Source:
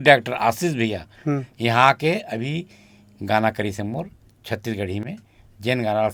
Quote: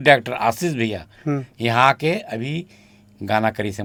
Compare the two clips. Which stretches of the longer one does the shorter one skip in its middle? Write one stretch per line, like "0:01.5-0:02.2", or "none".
none